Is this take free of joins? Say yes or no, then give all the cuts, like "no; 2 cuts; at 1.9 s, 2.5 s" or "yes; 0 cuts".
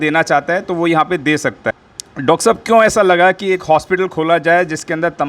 no; 1 cut; at 1.6 s